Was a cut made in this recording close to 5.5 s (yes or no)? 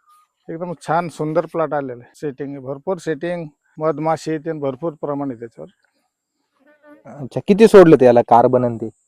no